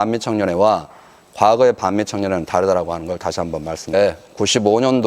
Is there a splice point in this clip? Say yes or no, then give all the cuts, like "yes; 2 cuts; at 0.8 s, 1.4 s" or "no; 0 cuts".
no; 0 cuts